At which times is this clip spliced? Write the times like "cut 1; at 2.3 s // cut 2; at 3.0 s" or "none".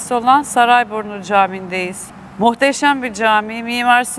none